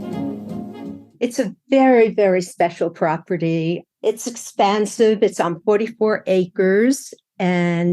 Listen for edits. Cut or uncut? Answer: cut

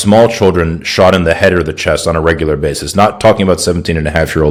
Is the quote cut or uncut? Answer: uncut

